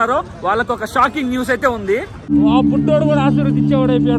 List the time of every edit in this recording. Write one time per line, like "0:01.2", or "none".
0:02.3